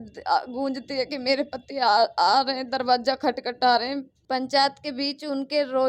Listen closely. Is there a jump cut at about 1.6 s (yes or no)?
no